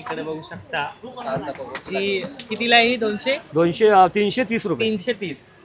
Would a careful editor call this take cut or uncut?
uncut